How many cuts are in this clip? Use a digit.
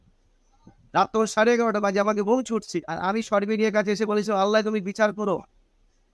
1